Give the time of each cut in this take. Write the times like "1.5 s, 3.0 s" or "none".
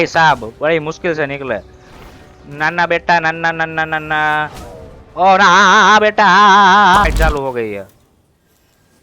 7.0 s